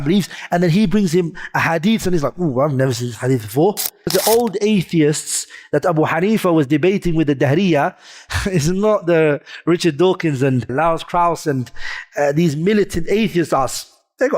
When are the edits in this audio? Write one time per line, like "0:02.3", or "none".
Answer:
0:04.1
0:10.7